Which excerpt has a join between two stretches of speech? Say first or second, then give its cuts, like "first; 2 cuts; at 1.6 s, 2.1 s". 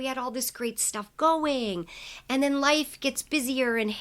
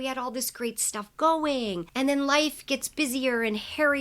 second; 1 cut; at 1.8 s